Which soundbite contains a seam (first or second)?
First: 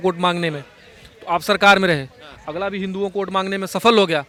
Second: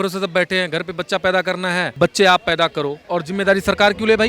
second